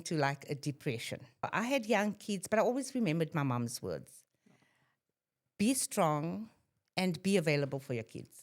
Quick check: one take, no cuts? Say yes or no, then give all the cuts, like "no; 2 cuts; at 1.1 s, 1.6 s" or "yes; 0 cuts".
no; 1 cut; at 1.5 s